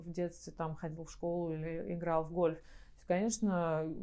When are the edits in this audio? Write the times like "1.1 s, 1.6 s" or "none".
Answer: none